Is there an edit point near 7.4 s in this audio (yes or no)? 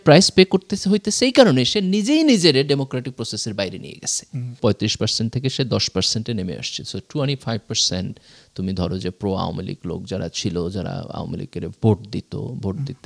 no